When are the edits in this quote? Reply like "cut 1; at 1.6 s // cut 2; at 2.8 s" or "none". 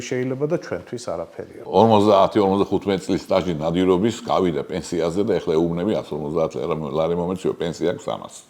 cut 1; at 1.6 s